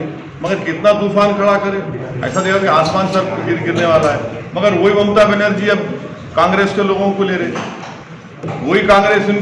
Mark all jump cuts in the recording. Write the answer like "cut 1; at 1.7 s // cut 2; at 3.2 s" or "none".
none